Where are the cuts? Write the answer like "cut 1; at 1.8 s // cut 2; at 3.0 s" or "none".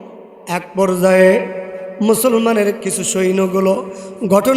cut 1; at 2.8 s